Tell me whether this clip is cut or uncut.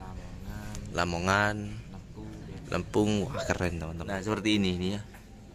cut